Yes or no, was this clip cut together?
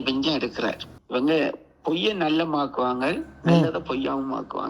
yes